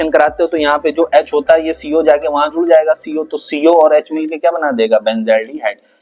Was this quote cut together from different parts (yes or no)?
no